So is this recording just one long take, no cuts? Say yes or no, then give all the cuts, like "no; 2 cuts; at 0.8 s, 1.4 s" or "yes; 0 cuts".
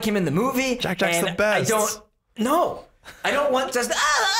yes; 0 cuts